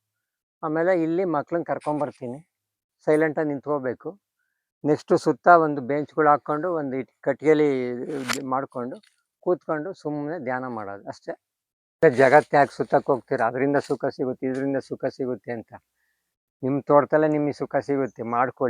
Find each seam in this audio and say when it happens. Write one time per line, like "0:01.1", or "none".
0:12.0